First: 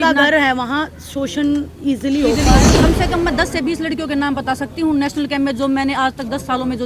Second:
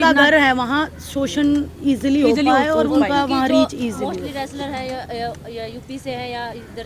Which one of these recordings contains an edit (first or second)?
first